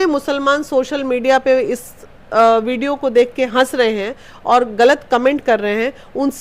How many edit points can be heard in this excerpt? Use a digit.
0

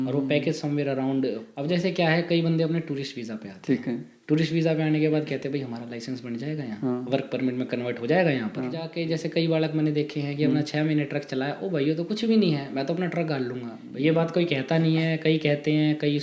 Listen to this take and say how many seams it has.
3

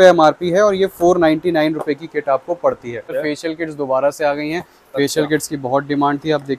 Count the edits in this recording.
1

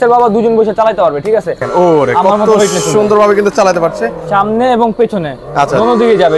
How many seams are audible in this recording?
1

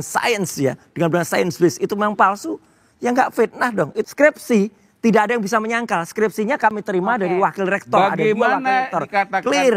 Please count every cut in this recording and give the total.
1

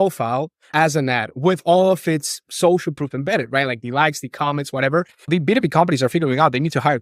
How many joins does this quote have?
1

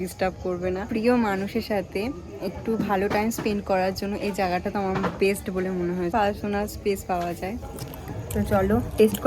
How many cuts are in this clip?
3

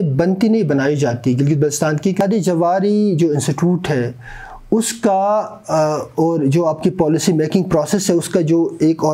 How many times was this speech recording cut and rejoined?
1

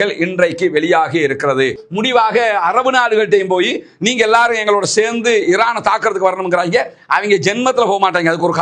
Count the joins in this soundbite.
1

